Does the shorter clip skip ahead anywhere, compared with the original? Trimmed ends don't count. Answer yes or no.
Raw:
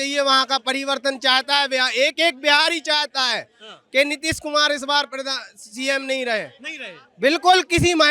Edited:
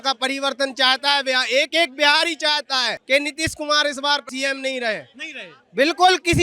yes